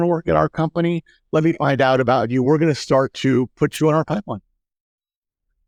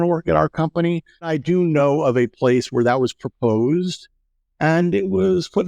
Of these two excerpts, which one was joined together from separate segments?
second; 1 cut; at 1.3 s

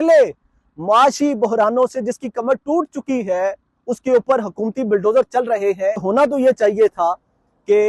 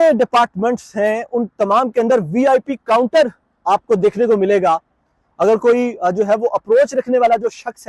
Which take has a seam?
first; 1 cut; at 6.0 s

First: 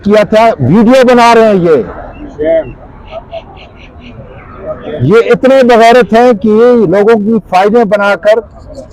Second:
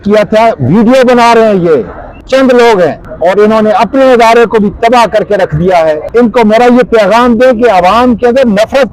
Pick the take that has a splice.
second; 3 cuts; at 2.2 s, 3.1 s, 6.0 s

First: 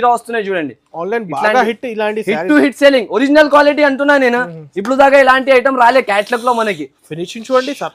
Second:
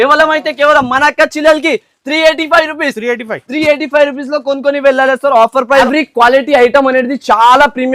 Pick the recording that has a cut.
second; 1 cut; at 5.8 s

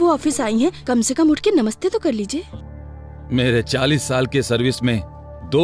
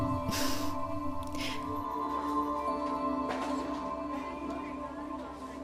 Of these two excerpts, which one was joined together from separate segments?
second; 1 cut; at 1.8 s

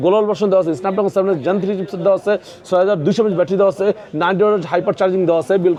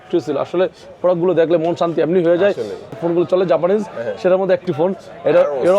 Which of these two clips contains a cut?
second; 1 cut; at 3.0 s

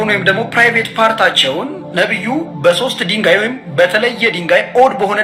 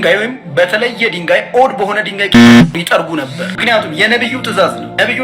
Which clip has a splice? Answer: second; 1 cut; at 3.4 s

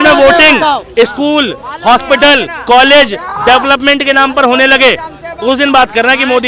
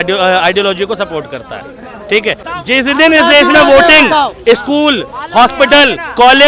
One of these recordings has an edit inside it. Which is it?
second; 1 cut; at 2.5 s

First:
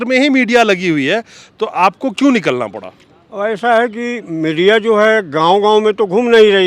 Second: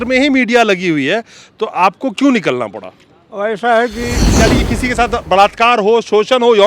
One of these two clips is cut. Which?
second; 1 cut; at 4.4 s

